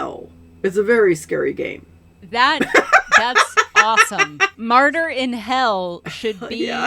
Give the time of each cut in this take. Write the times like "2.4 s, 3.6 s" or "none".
4.6 s